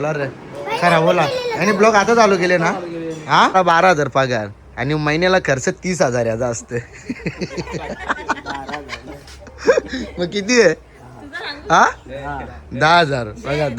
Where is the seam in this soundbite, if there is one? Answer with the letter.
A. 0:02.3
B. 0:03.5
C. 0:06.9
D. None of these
B